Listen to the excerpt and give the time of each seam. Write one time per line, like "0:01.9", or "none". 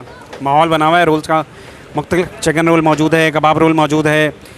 0:02.3